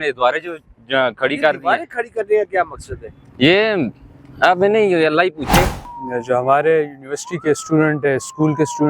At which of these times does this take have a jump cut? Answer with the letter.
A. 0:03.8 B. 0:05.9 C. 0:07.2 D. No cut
B